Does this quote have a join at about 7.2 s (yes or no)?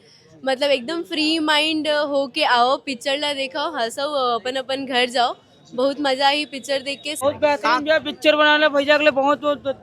yes